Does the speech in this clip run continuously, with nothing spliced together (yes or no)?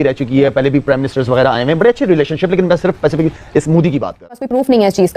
no